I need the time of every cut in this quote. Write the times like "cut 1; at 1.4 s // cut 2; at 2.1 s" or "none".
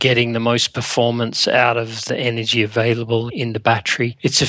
none